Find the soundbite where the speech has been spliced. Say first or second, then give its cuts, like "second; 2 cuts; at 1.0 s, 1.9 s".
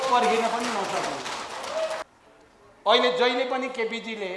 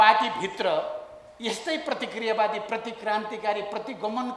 first; 1 cut; at 2.0 s